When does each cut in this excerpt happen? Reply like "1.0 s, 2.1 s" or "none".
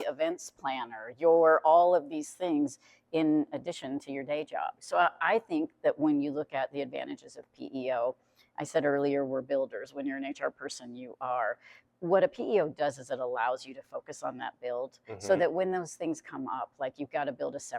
4.8 s